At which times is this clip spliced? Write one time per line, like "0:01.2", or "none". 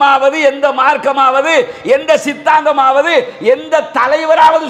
none